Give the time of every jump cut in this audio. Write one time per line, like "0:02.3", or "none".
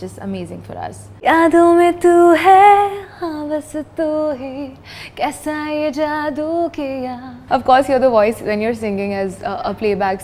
0:01.1
0:07.4